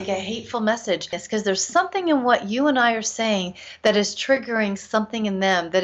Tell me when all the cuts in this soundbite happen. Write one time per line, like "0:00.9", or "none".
0:01.2